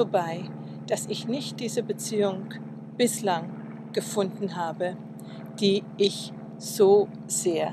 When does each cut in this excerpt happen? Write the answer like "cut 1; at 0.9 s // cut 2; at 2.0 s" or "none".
cut 1; at 5.5 s